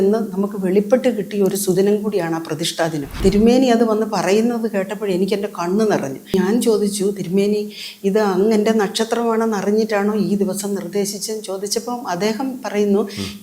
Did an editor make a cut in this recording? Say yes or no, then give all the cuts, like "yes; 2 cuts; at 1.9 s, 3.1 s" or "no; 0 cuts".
yes; 2 cuts; at 3.2 s, 6.3 s